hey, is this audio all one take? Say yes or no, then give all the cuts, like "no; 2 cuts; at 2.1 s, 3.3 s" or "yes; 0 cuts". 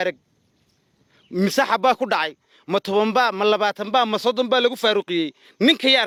yes; 0 cuts